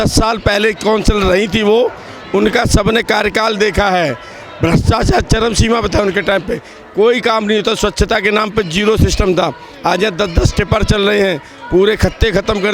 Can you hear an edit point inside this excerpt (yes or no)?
no